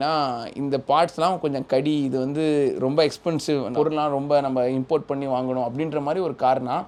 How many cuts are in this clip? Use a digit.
0